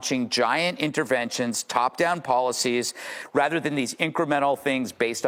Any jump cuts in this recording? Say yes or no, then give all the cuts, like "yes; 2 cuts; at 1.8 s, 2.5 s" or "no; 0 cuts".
no; 0 cuts